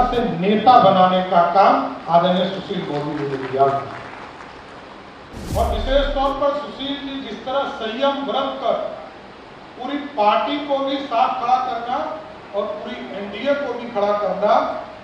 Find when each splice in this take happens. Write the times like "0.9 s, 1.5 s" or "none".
5.3 s